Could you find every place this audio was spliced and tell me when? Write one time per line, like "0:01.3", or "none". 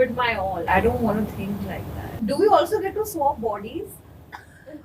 0:02.1